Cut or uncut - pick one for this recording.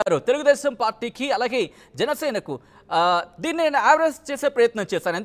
uncut